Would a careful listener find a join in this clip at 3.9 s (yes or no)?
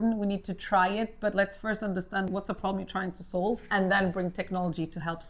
no